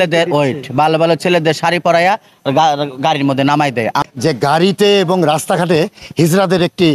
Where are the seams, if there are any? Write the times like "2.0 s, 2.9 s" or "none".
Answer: 4.0 s